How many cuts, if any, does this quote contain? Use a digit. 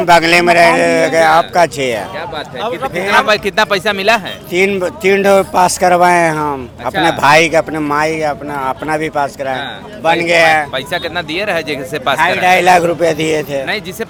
0